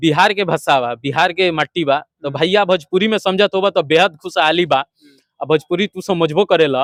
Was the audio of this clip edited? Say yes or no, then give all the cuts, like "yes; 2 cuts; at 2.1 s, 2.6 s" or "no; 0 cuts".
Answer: no; 0 cuts